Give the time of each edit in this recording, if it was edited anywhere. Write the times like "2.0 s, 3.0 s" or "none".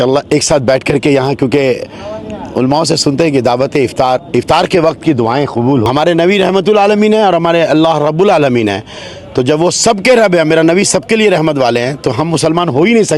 5.9 s